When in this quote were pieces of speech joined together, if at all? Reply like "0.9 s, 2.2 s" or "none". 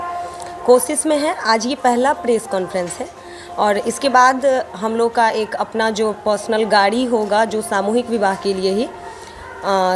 none